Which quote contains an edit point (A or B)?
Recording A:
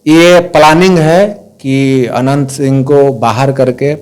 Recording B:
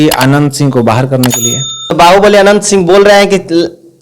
B